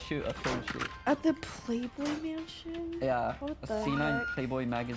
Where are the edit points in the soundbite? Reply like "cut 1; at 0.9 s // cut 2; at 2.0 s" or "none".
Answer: none

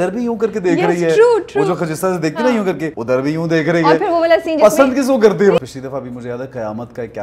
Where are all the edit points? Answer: cut 1; at 2.9 s // cut 2; at 5.6 s

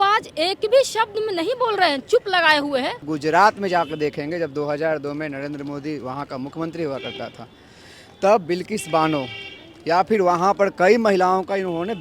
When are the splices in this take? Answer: cut 1; at 3.1 s

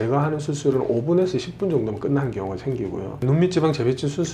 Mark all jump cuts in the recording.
none

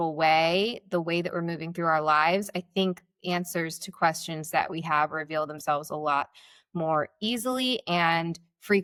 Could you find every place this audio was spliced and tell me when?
none

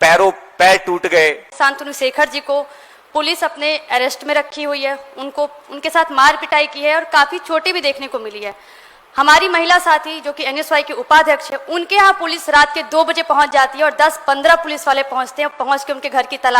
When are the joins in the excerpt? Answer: cut 1; at 1.4 s

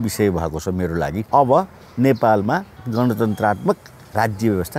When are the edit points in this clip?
cut 1; at 1.2 s // cut 2; at 2.8 s

